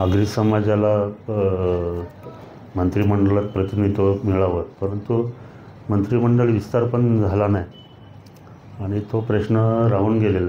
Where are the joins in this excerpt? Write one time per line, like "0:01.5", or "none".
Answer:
none